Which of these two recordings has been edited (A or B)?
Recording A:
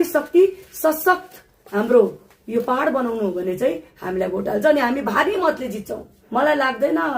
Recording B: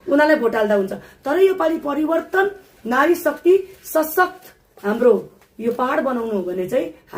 A